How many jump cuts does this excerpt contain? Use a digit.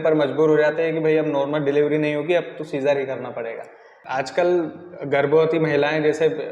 1